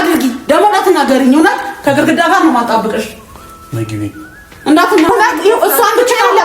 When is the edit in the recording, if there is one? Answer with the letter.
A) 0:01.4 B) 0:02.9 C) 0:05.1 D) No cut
C